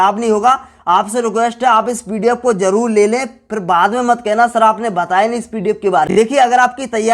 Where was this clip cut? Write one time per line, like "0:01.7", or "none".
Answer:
0:06.1